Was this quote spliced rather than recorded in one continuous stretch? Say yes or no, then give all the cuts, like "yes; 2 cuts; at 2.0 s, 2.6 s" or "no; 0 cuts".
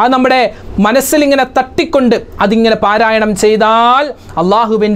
no; 0 cuts